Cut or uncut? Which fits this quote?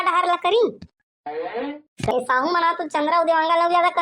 cut